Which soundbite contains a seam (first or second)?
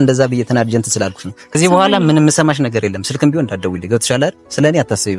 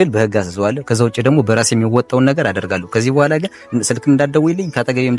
first